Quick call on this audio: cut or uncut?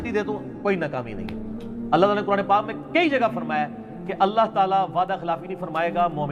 uncut